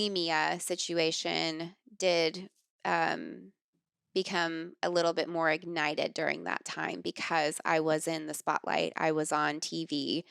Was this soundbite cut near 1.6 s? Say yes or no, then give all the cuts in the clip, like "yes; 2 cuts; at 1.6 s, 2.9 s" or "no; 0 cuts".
no; 0 cuts